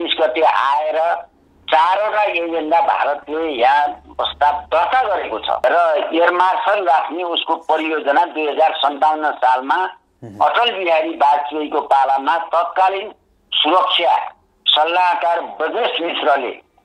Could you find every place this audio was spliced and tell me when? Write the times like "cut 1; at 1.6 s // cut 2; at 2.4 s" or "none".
cut 1; at 5.6 s